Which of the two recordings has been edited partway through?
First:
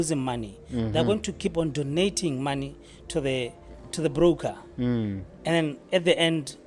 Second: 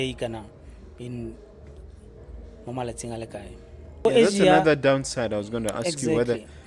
second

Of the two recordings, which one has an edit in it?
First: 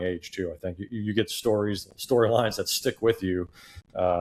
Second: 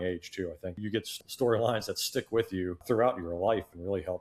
second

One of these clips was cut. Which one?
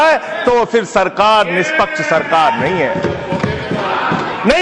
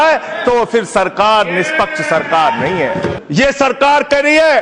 second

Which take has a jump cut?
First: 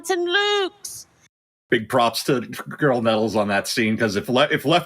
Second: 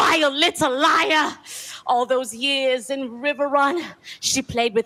first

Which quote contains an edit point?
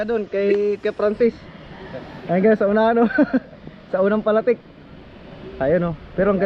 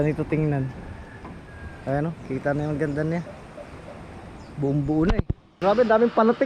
second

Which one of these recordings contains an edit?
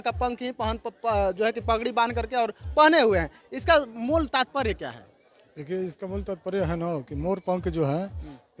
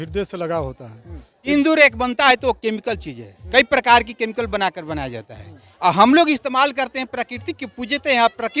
second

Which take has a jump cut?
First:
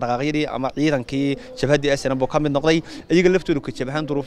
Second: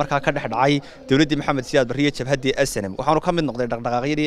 first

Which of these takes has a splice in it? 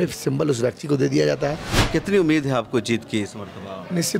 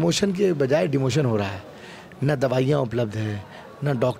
first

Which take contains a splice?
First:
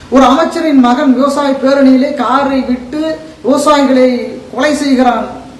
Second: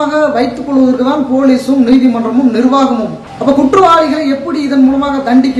second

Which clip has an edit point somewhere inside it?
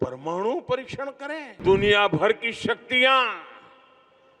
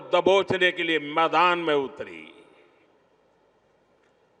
first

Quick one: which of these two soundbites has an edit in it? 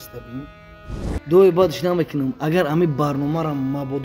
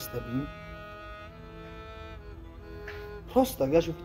first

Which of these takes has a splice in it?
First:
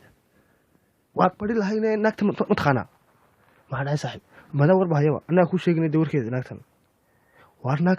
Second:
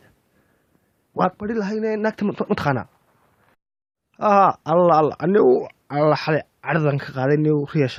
first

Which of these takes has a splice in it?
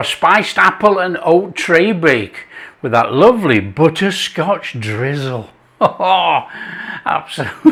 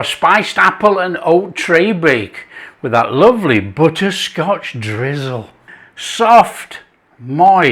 second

